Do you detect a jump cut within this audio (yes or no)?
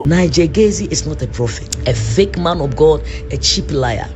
yes